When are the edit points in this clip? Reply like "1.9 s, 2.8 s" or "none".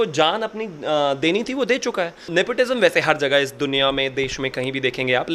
2.3 s